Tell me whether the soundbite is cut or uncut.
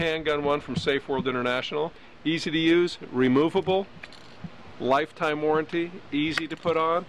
cut